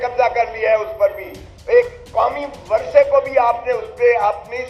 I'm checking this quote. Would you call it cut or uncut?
uncut